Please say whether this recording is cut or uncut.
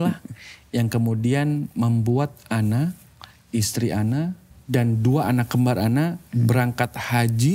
cut